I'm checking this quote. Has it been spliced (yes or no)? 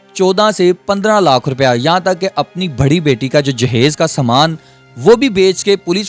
no